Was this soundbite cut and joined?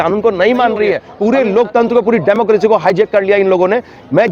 yes; 1 cut; at 1.1 s

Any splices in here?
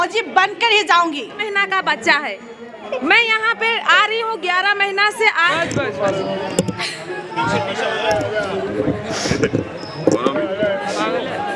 yes; 2 cuts; at 1.4 s, 5.5 s

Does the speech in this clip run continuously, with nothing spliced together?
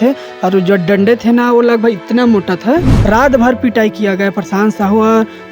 no; 1 cut; at 2.9 s

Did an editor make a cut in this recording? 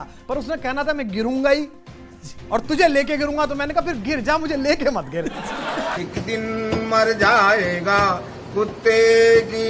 no; 0 cuts

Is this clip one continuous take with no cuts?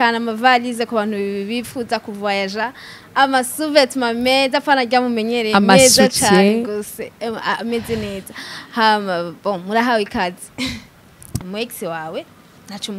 no; 1 cut; at 11.4 s

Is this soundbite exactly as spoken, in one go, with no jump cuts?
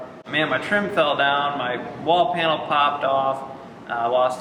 yes; 0 cuts

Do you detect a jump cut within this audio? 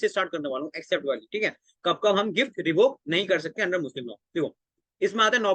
no; 0 cuts

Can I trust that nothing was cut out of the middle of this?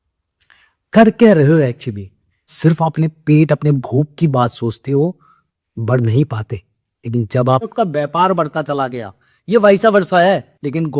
no; 2 cuts; at 2.5 s, 7.7 s

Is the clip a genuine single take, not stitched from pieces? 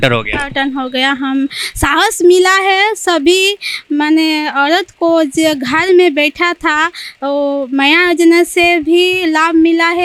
yes; 0 cuts

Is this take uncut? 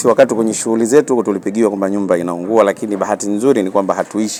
yes; 0 cuts

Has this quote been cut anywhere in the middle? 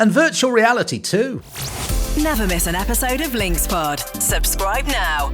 yes; 1 cut; at 1.4 s

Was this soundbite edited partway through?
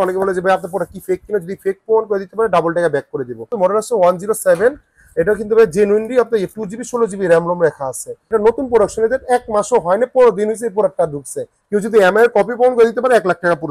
yes; 3 cuts; at 3.5 s, 8.2 s, 11.5 s

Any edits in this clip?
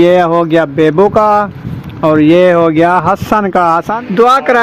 yes; 1 cut; at 3.6 s

